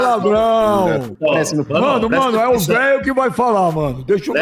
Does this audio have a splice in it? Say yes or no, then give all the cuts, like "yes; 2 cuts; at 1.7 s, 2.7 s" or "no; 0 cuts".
yes; 1 cut; at 1.1 s